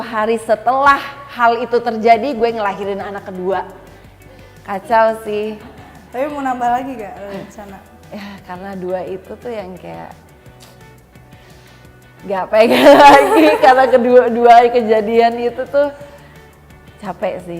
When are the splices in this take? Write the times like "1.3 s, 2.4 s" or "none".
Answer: none

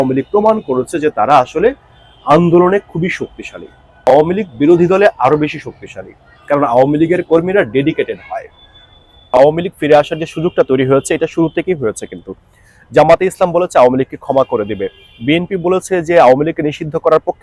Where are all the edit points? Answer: 4.1 s, 9.2 s

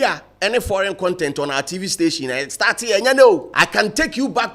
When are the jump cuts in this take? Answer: 3.5 s

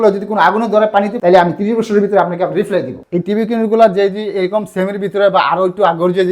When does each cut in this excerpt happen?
1.1 s, 3.0 s

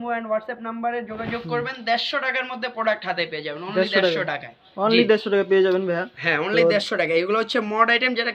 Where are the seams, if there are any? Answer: none

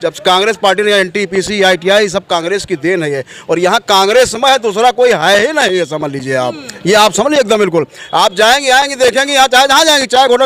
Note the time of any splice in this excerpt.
none

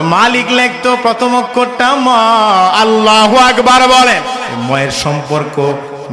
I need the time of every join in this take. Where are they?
4.4 s

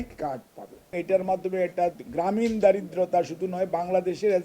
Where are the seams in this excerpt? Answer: 1.0 s

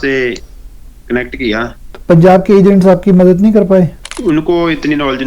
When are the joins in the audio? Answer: 1.9 s, 4.1 s

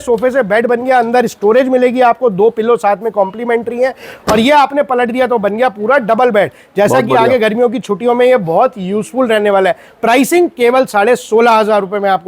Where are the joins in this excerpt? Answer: none

